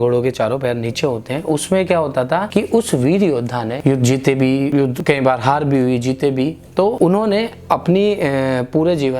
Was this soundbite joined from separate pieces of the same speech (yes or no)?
yes